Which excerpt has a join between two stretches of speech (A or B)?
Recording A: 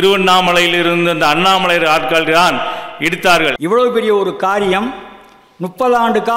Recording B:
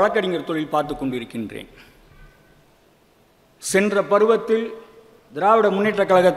A